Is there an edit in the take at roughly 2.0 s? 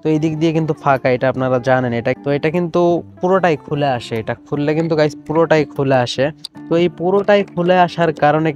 no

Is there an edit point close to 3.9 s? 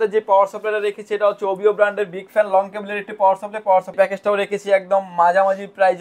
yes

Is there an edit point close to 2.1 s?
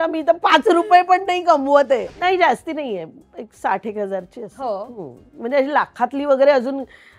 yes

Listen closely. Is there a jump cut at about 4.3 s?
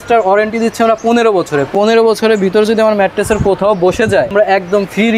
yes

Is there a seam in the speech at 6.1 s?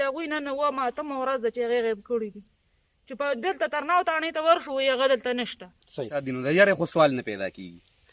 yes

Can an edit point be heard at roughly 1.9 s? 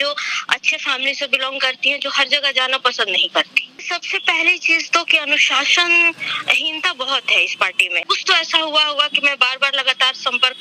no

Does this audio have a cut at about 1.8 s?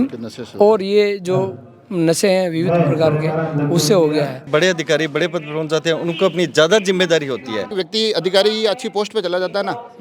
no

